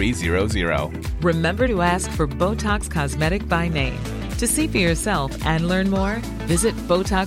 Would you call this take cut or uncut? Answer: uncut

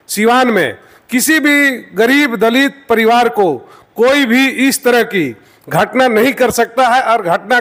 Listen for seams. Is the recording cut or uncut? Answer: uncut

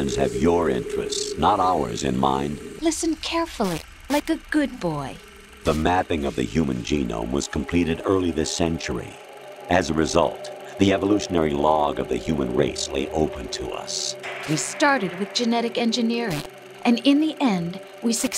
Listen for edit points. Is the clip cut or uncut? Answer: cut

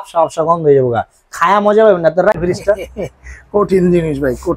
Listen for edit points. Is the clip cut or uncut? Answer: cut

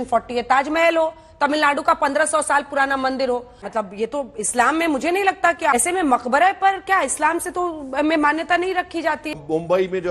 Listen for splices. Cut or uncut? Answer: cut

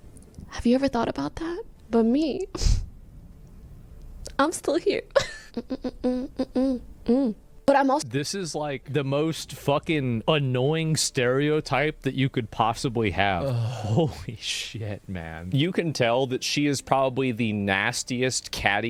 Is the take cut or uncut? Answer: uncut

